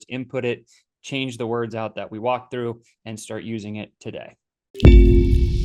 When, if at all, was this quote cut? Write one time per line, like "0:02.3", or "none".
0:04.7